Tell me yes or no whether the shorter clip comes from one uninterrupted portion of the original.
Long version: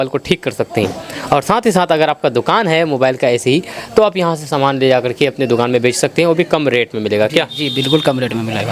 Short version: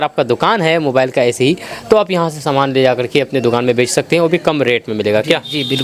yes